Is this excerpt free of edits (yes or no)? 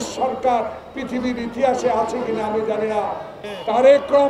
no